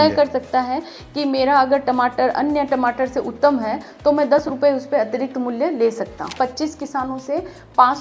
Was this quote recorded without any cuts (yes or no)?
no